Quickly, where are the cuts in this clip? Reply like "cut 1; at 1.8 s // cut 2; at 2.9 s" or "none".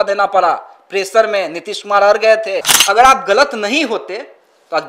cut 1; at 2.7 s